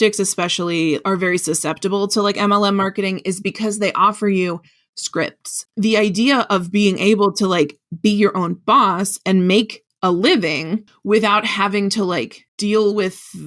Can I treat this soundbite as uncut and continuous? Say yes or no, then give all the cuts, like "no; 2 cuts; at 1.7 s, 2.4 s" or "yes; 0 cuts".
no; 2 cuts; at 1.0 s, 5.6 s